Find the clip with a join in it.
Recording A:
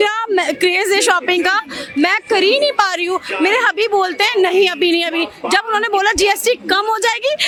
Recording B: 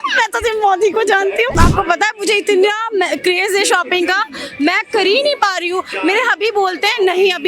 B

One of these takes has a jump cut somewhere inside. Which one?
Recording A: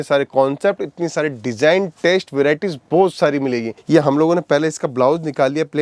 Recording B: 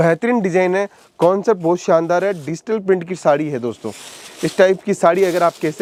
A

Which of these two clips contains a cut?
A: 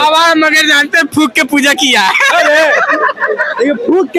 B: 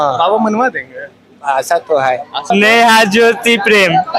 B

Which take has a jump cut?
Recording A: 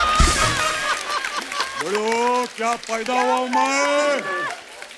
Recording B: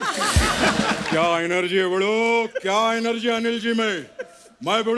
B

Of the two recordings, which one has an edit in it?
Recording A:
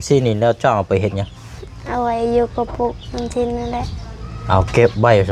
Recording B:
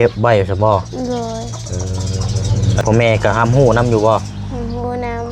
B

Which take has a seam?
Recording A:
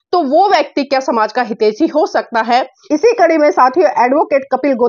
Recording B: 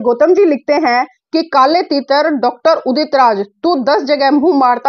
A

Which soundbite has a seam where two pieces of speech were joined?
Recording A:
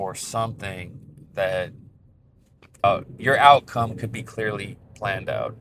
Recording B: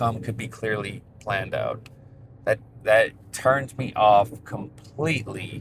A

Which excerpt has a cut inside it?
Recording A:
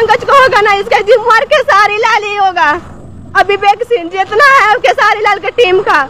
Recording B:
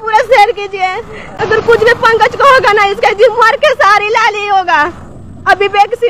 B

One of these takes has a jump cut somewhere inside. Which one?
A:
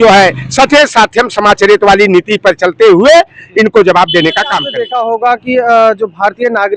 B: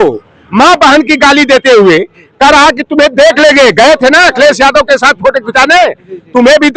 A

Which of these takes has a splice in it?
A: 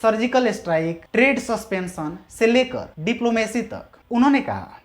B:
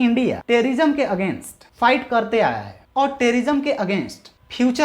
A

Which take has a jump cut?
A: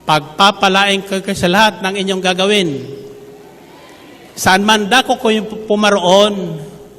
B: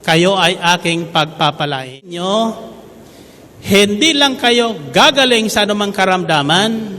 B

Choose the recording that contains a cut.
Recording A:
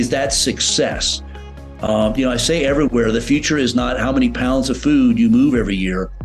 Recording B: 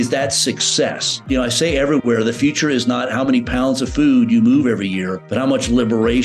B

